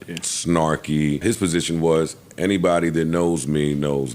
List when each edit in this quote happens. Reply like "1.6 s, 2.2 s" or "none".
1.2 s

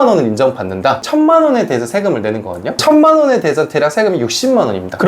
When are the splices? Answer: 1.0 s

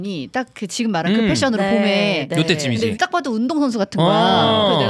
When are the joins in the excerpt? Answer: 2.9 s

